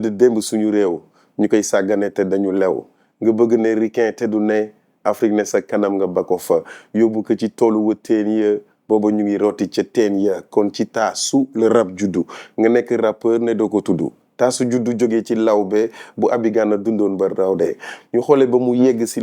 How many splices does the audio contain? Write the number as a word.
zero